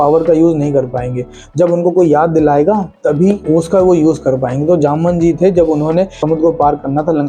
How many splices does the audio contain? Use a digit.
2